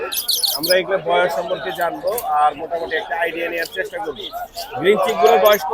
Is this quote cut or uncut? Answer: uncut